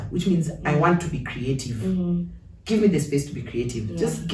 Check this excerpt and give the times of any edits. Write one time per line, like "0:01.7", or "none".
none